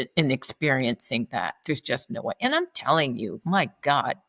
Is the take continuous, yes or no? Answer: yes